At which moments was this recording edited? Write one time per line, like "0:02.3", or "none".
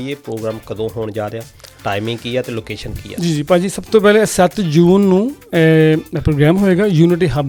none